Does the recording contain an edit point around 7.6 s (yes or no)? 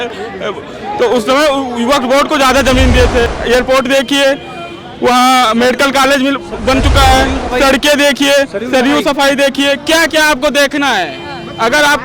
no